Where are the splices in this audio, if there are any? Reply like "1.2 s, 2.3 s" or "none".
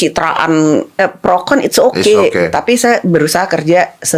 1.0 s